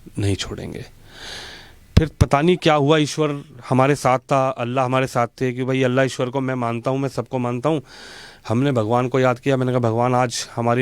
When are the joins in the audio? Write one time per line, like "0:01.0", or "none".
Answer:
none